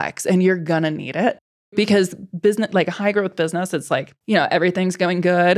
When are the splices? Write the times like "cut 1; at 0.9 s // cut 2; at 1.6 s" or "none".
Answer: cut 1; at 4.1 s